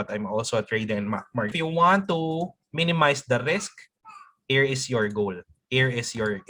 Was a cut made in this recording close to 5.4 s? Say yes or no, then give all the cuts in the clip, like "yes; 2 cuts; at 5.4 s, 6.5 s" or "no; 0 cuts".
no; 1 cut; at 1.5 s